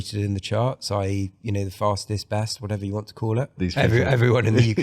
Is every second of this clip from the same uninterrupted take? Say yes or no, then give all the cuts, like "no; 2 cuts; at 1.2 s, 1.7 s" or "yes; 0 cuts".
no; 1 cut; at 3.5 s